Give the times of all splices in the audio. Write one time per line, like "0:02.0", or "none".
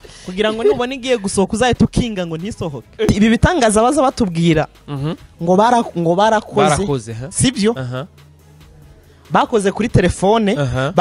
0:03.1